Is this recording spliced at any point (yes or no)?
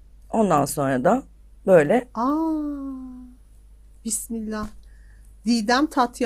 no